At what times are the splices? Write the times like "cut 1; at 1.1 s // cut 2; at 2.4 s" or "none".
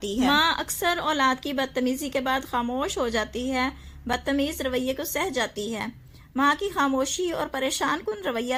none